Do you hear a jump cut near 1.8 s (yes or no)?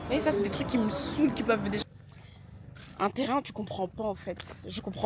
yes